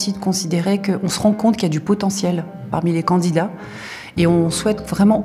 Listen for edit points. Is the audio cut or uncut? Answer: uncut